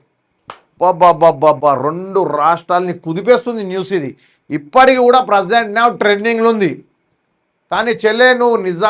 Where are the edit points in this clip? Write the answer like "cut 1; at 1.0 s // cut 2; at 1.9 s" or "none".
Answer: none